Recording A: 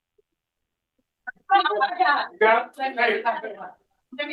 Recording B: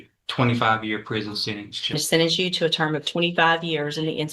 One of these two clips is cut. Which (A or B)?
B